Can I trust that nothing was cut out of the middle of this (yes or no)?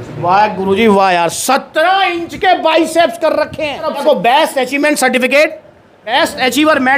no